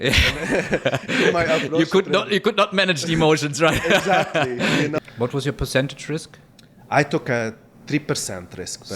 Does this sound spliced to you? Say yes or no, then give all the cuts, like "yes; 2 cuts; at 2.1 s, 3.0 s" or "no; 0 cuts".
yes; 1 cut; at 5.0 s